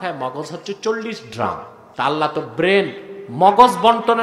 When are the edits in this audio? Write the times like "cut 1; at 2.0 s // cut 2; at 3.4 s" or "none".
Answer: cut 1; at 1.8 s